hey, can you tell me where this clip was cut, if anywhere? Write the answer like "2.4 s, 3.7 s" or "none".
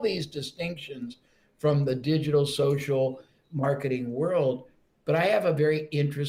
none